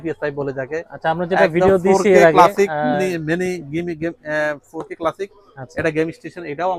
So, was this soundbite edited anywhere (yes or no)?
no